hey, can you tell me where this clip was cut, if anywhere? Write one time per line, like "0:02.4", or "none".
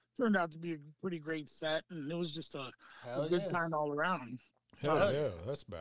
none